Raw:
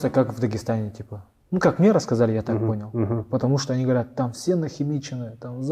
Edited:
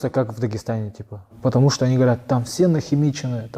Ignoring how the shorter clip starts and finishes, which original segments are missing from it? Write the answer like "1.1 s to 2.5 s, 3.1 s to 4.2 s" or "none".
1.3 s to 3.2 s